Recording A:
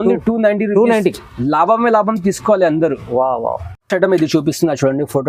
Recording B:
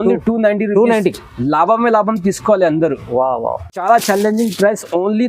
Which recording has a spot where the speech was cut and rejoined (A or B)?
B